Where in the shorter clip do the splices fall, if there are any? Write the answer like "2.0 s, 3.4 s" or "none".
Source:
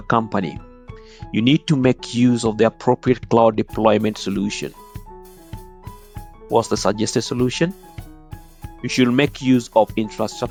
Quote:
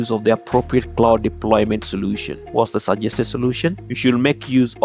2.4 s, 3.9 s